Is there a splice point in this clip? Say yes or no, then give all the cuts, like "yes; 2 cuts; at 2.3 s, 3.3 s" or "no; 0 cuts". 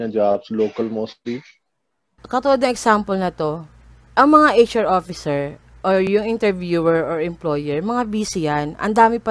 no; 0 cuts